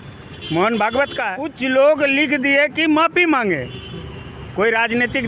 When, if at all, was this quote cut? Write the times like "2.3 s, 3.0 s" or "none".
1.5 s